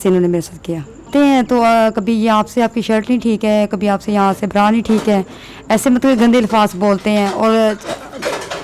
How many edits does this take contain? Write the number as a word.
one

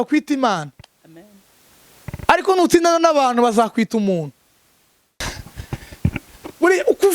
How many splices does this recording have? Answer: one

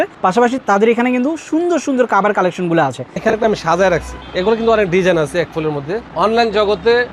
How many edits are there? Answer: two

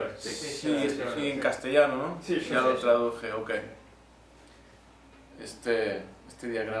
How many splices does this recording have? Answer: one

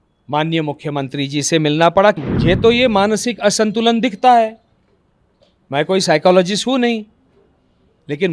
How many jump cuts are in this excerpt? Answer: one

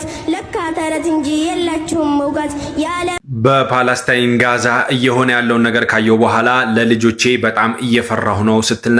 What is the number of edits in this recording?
one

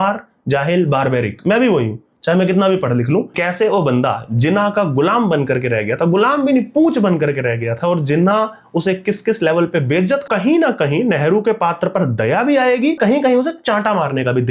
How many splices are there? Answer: three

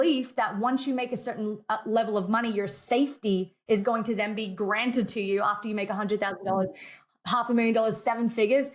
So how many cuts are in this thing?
zero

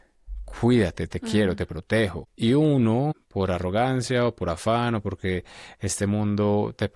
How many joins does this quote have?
two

